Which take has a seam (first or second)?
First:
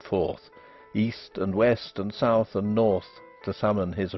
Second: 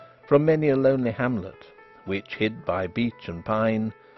second